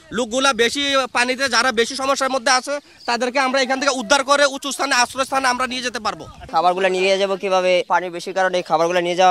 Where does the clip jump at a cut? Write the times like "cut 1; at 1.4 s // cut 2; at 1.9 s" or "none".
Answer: cut 1; at 6.3 s // cut 2; at 7.9 s